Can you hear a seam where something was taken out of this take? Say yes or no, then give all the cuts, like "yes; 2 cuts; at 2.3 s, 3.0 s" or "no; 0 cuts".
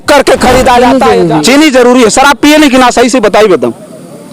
yes; 1 cut; at 1.0 s